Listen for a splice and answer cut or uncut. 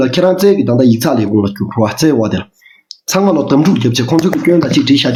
uncut